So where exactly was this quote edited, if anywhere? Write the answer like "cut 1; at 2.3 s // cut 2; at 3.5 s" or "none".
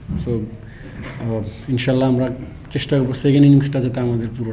none